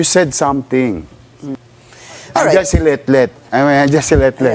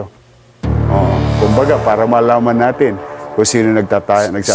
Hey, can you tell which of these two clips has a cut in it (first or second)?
first